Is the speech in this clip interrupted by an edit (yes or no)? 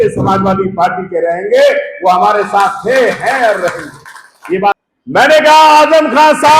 yes